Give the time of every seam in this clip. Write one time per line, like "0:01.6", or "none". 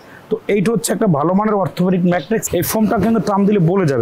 0:02.4